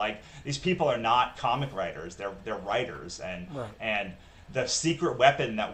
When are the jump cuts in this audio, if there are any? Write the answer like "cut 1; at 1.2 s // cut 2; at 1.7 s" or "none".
none